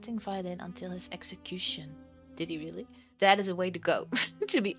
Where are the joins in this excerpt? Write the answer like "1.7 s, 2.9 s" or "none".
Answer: 3.0 s